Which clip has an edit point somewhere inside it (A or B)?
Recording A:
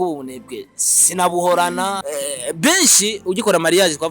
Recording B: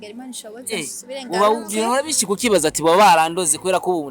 A